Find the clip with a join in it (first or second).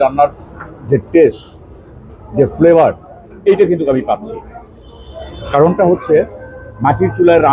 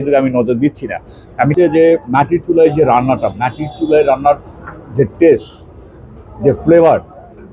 second